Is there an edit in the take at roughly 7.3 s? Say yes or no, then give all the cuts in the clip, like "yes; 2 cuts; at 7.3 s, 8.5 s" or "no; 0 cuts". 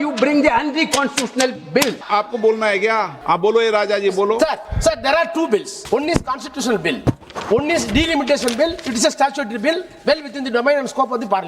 yes; 5 cuts; at 2.0 s, 3.1 s, 4.7 s, 5.7 s, 7.3 s